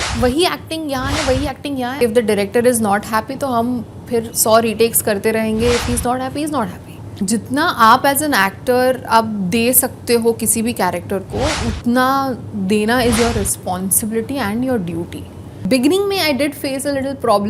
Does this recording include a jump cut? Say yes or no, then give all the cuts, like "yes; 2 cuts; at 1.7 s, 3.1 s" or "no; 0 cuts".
yes; 3 cuts; at 2.0 s, 7.1 s, 15.7 s